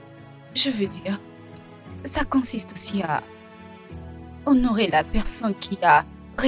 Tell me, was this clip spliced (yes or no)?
no